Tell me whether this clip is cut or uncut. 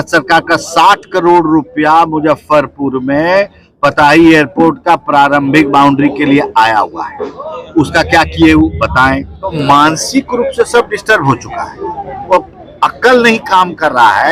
cut